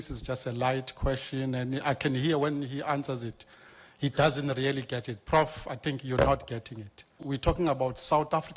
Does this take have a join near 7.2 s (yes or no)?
yes